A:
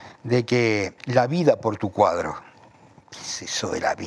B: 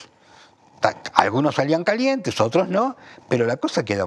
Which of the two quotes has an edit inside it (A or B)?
A